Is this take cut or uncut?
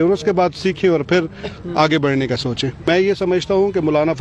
cut